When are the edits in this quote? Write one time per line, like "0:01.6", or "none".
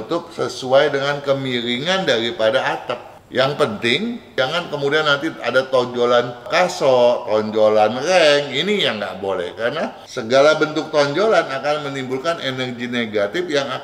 0:03.1
0:04.3
0:06.4
0:10.0